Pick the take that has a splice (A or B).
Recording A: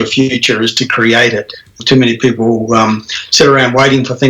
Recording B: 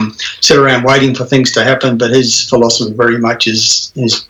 A